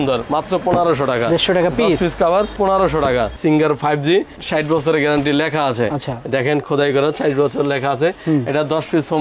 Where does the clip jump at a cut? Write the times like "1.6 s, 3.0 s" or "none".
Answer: 3.3 s